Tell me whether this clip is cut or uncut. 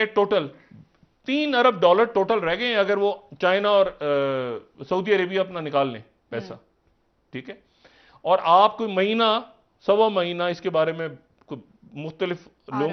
uncut